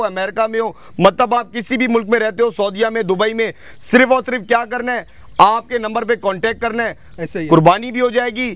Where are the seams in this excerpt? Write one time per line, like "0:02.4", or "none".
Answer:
none